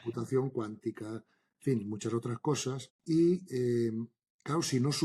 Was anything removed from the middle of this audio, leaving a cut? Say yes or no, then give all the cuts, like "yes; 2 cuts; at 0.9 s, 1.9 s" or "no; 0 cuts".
yes; 1 cut; at 2.9 s